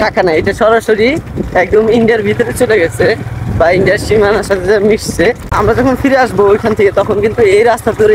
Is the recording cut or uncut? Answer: cut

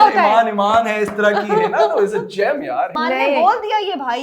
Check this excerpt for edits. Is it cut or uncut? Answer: cut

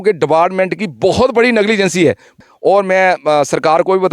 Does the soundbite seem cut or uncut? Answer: cut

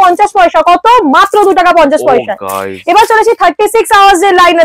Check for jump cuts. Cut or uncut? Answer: uncut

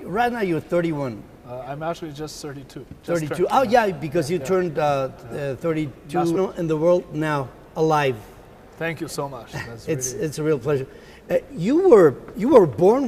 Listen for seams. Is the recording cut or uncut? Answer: uncut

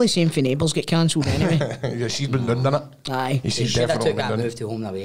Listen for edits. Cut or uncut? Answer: uncut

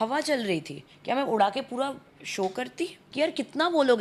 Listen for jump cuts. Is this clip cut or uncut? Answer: cut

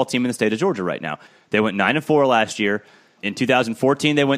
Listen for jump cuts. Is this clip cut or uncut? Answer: cut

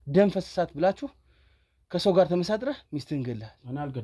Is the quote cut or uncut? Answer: uncut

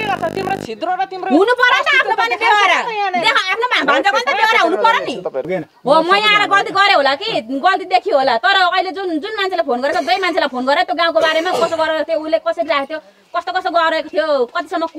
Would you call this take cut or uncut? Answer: cut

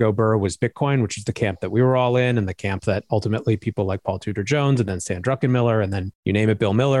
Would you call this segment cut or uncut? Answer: uncut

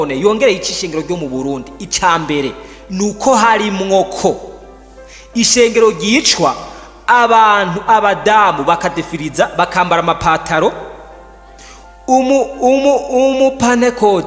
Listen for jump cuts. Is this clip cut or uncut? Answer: uncut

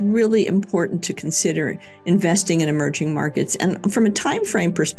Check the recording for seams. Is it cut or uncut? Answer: uncut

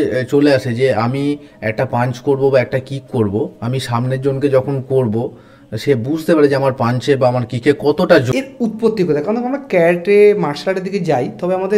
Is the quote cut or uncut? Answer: cut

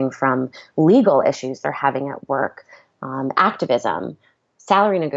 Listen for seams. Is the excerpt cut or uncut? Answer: uncut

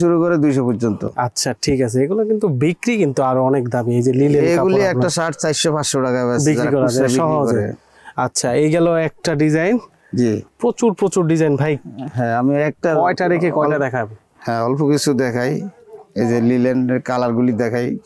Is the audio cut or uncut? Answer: uncut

